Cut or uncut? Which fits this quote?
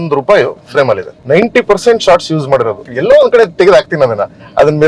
cut